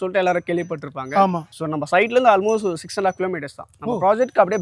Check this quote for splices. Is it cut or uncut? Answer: uncut